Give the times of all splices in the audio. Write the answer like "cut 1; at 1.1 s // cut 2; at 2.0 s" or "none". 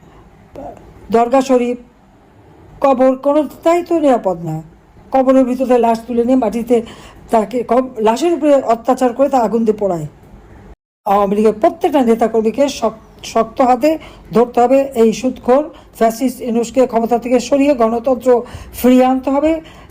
cut 1; at 10.9 s